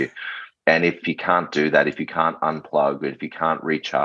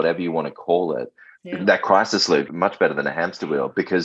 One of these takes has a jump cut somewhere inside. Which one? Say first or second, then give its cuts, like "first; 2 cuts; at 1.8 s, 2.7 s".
second; 1 cut; at 2.5 s